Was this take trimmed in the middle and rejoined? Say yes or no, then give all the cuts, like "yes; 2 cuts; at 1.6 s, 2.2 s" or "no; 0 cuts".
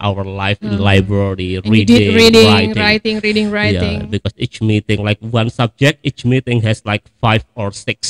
no; 0 cuts